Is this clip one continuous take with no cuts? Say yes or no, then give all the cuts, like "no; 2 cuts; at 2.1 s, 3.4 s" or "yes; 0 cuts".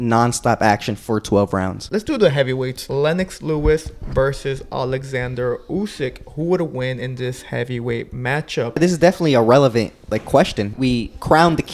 no; 4 cuts; at 2.0 s, 2.8 s, 8.8 s, 10.7 s